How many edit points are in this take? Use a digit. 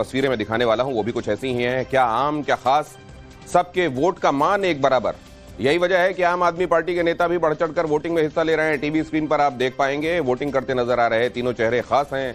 1